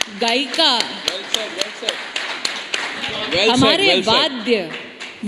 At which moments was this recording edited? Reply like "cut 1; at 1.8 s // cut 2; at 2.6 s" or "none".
cut 1; at 2.9 s